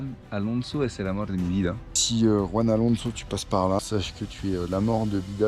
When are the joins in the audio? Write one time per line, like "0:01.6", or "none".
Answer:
0:02.0
0:03.8